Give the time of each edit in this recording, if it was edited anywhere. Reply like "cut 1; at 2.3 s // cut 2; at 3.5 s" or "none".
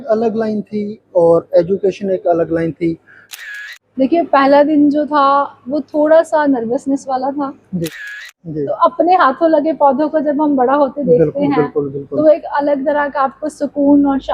cut 1; at 3.3 s // cut 2; at 8.2 s